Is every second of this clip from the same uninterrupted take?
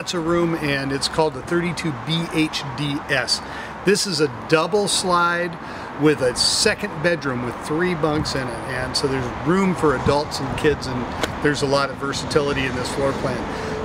yes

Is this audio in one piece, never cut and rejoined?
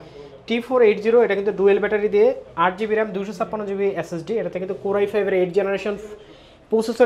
yes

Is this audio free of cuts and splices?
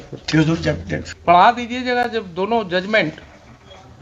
no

